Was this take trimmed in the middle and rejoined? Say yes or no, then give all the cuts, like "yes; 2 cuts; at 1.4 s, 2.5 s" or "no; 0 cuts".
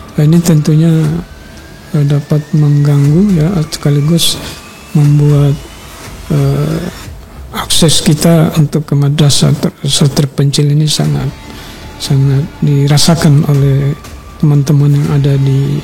no; 0 cuts